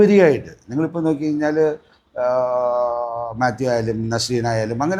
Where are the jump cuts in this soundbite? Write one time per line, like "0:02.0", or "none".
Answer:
none